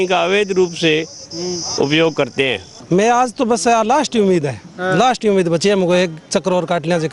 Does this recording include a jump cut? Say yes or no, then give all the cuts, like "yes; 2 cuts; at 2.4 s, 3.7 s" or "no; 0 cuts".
yes; 1 cut; at 2.7 s